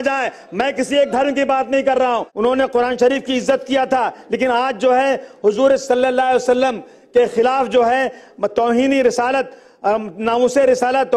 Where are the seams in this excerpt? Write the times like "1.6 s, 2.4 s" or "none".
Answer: 2.1 s